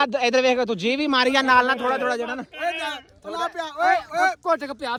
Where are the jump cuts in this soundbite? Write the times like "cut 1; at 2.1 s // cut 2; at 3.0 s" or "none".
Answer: none